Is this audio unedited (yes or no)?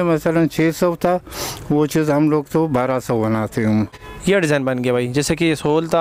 no